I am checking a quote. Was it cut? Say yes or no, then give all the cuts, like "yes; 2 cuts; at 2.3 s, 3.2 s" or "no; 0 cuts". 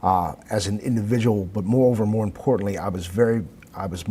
no; 0 cuts